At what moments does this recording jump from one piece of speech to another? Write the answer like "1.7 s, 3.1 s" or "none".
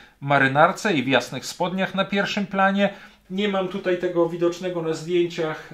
3.2 s